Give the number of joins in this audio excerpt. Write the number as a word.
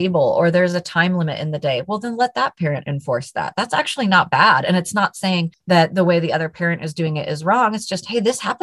one